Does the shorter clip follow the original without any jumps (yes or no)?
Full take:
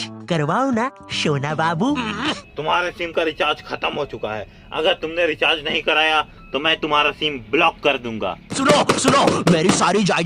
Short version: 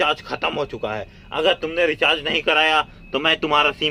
yes